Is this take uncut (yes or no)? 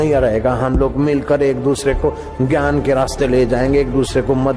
yes